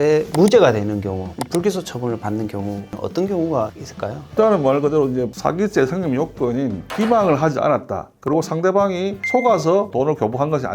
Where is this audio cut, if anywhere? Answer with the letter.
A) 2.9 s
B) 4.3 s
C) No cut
A